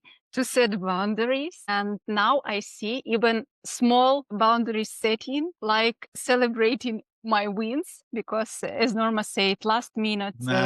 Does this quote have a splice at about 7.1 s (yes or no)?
no